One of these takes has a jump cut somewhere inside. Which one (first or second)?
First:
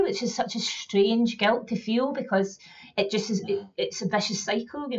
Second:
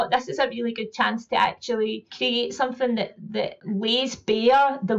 second